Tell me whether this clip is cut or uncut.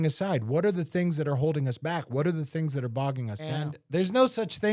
cut